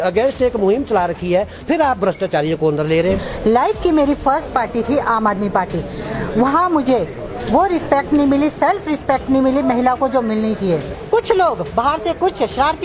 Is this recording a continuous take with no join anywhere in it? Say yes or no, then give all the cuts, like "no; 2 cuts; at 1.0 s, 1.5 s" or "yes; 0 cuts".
no; 2 cuts; at 3.3 s, 10.9 s